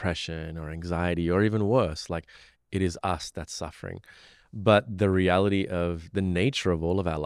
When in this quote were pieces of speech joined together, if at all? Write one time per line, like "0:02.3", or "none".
none